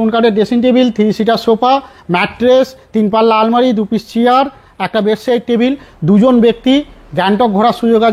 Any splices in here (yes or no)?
no